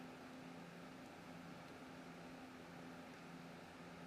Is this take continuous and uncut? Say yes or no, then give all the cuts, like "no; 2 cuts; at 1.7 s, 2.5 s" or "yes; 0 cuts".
yes; 0 cuts